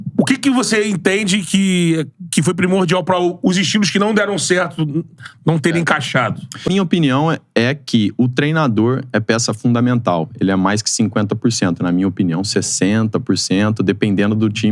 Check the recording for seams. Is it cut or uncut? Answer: uncut